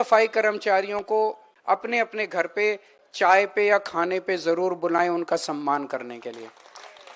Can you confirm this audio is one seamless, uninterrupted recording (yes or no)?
no